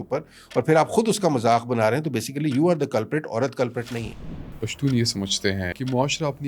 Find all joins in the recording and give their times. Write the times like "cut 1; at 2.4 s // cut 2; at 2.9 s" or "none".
cut 1; at 4.6 s // cut 2; at 5.7 s